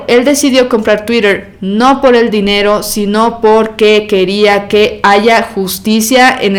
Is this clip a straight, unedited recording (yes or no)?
yes